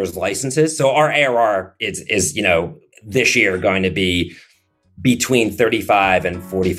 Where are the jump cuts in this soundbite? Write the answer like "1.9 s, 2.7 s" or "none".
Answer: none